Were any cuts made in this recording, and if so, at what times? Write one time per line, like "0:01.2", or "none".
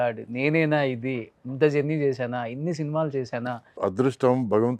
0:03.7